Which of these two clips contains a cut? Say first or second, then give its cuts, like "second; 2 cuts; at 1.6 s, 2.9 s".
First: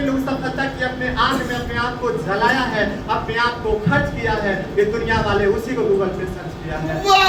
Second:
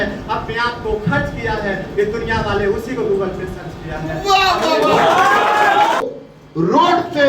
second; 1 cut; at 6.0 s